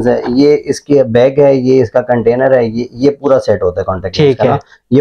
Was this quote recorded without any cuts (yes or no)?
yes